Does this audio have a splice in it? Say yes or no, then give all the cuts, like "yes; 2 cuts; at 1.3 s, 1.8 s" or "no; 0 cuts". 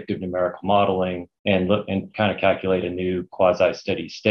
yes; 1 cut; at 1.3 s